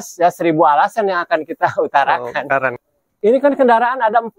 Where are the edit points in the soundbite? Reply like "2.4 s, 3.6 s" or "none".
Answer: 2.8 s